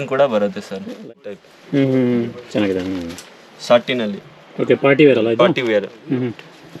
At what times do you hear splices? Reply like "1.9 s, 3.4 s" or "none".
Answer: 1.0 s